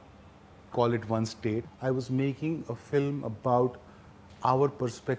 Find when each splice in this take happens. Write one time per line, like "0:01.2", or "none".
0:01.6